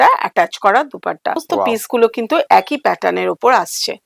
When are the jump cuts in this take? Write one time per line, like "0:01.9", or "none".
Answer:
0:01.4